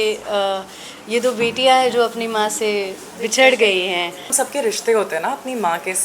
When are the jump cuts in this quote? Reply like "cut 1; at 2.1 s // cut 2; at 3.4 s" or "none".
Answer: cut 1; at 4.3 s